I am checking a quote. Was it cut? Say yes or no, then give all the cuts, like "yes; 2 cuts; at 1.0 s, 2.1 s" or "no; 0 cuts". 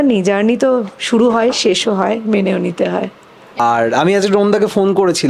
yes; 1 cut; at 3.6 s